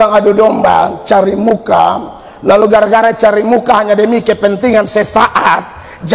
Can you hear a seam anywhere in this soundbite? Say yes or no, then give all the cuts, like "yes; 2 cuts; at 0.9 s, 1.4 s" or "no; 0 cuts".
no; 0 cuts